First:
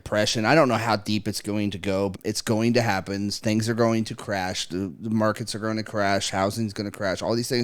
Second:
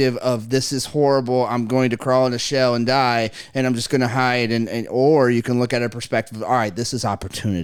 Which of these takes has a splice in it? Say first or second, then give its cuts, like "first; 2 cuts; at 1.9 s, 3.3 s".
first; 1 cut; at 2.2 s